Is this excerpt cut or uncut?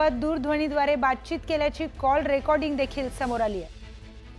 uncut